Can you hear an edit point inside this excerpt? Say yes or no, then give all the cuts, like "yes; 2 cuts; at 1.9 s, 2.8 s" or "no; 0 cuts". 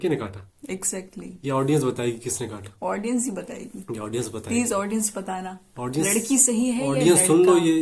no; 0 cuts